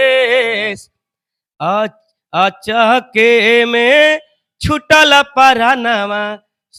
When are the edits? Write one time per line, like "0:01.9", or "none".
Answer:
none